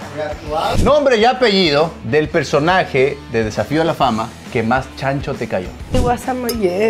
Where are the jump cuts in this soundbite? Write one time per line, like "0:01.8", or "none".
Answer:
0:00.8
0:02.0
0:03.2
0:04.4
0:05.8